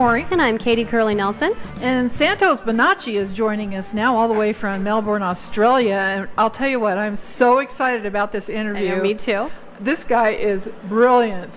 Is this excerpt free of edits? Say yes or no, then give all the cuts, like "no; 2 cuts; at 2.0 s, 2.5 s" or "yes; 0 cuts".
yes; 0 cuts